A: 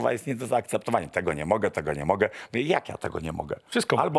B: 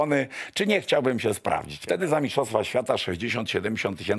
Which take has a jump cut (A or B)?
B